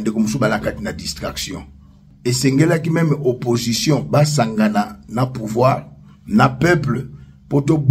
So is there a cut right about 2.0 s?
yes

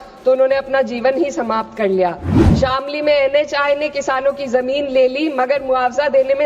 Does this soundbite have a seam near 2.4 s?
yes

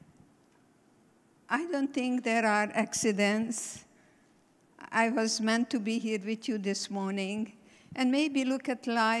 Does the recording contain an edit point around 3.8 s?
no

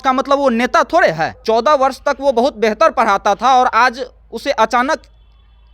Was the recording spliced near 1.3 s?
yes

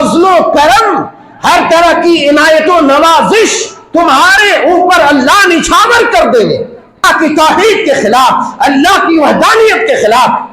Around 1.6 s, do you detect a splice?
no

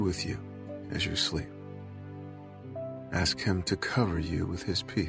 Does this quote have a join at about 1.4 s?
yes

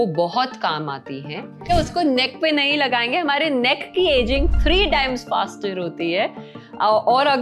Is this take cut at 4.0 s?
no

